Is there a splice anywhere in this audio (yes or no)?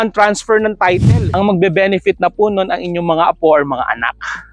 yes